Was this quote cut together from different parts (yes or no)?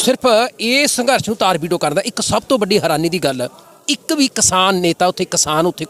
no